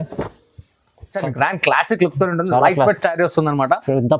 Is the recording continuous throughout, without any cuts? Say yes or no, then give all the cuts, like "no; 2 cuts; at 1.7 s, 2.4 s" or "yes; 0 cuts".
no; 1 cut; at 1.2 s